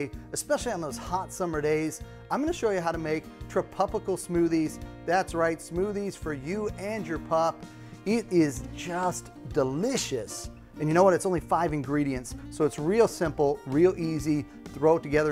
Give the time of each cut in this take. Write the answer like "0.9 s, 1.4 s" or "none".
8.7 s

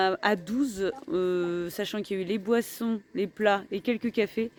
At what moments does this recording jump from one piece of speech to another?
none

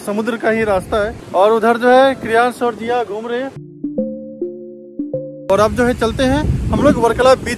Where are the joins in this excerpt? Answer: 1.2 s, 3.6 s, 5.3 s

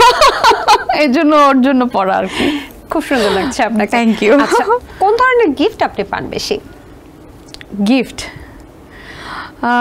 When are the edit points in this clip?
none

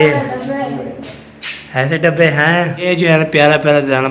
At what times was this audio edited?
2.9 s

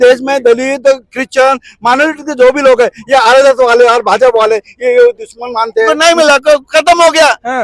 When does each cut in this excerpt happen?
5.9 s

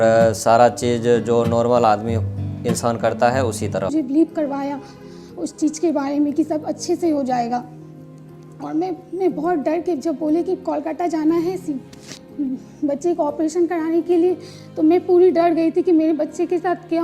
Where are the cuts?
3.9 s

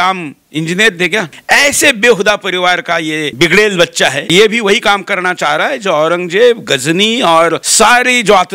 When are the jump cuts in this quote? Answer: 1.3 s, 3.3 s, 4.3 s, 7.6 s

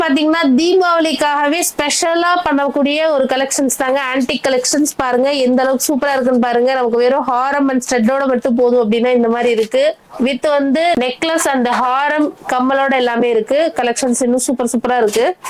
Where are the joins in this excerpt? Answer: none

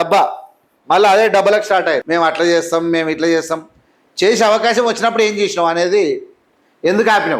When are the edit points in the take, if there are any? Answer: 2.0 s

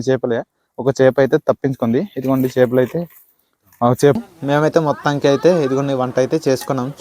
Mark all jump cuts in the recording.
4.2 s

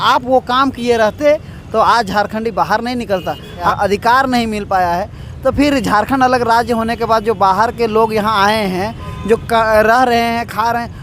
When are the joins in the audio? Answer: 3.7 s

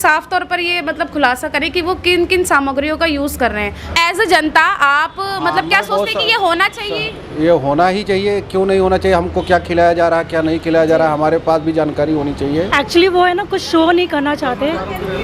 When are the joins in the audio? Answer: 3.9 s, 12.7 s

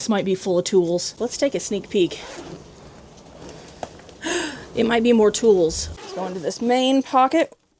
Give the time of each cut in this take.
1.1 s, 5.9 s

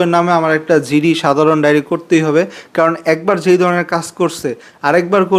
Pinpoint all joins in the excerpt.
none

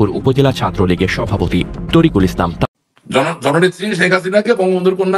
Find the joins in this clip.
2.6 s

